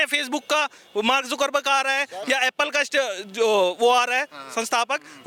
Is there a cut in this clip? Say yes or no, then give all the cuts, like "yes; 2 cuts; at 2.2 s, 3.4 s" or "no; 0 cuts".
no; 0 cuts